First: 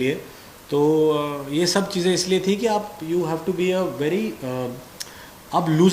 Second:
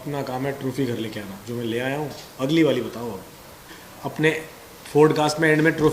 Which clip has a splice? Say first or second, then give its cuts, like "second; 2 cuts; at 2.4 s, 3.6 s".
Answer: second; 1 cut; at 3.8 s